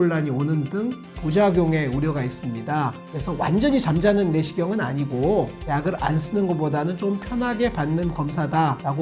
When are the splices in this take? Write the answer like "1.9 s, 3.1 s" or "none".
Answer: 5.6 s

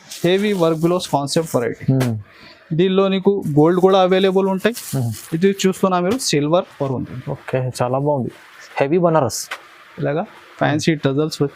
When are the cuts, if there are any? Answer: 6.8 s

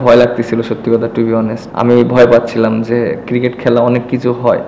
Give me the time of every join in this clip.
1.6 s

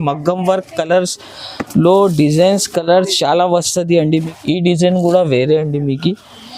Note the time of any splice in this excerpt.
4.3 s

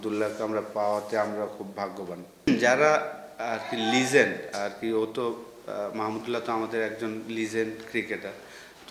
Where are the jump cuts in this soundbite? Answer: 2.5 s

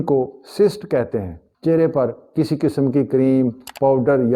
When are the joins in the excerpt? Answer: none

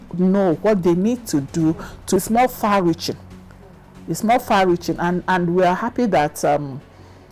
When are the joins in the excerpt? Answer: 2.2 s

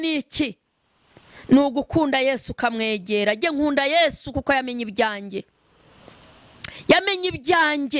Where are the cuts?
none

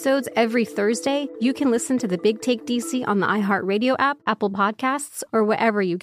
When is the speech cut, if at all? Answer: 1.3 s, 4.2 s

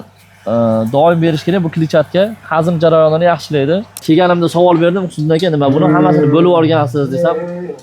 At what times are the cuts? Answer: 4.0 s

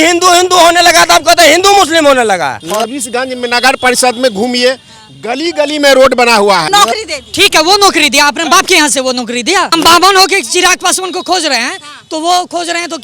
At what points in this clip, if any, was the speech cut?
2.6 s, 6.7 s, 9.7 s

